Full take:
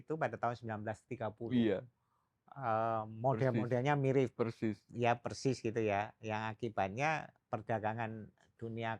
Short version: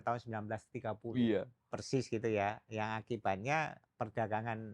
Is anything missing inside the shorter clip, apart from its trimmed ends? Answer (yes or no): yes